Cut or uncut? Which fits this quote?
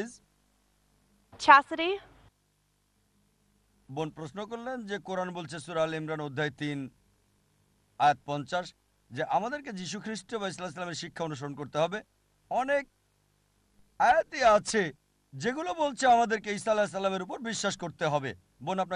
uncut